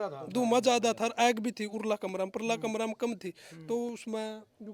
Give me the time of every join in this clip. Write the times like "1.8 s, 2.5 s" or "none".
none